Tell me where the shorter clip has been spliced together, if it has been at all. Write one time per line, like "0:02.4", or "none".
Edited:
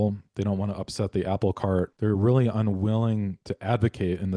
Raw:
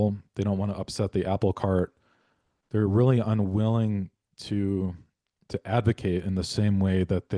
0:01.9
0:03.5